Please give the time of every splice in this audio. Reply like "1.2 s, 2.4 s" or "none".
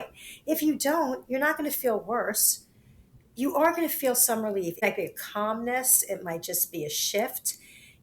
4.8 s